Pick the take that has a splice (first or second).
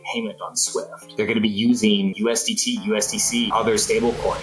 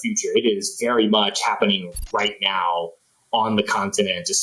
first